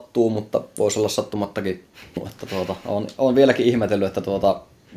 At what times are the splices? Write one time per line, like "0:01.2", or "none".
0:02.3